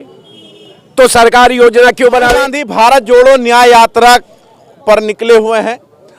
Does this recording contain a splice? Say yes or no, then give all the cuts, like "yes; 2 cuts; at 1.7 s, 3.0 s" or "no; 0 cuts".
yes; 1 cut; at 2.6 s